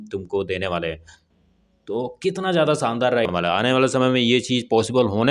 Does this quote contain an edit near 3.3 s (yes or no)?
yes